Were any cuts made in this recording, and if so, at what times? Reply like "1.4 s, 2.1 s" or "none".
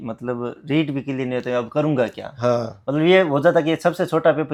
none